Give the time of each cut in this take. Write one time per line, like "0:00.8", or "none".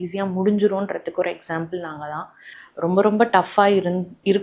0:02.7

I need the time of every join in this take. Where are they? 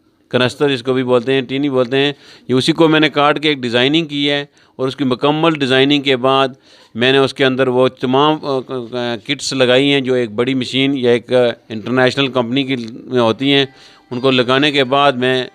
none

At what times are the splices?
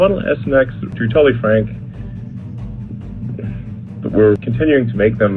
0:00.9
0:04.5

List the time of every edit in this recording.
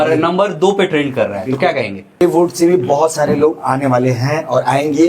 0:02.2

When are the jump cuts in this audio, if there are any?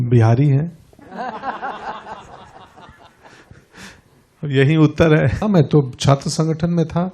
0:05.4

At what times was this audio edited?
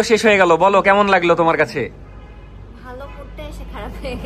none

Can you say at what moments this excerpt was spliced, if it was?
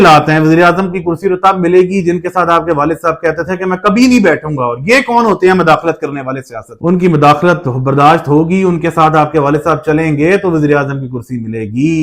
none

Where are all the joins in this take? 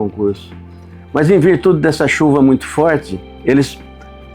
none

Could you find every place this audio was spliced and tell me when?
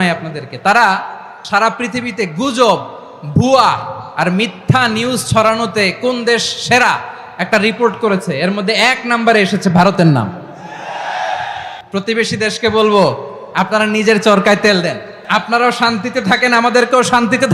0:11.8
0:15.1

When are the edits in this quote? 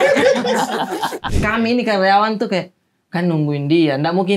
0:01.3

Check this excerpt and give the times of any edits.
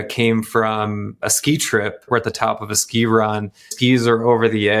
0:02.1

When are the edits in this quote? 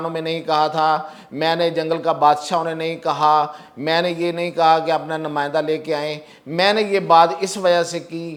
none

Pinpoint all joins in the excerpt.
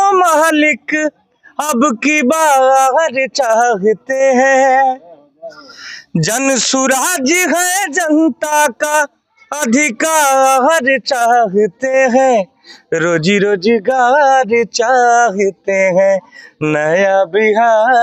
none

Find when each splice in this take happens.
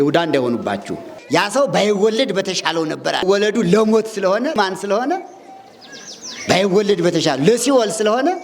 0:01.2
0:03.2
0:04.6

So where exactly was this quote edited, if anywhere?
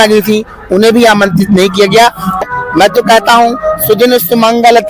0:02.4

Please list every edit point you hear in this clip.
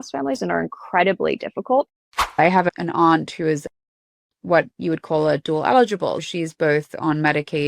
0:01.9
0:06.2

